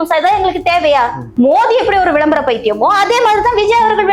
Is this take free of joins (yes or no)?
no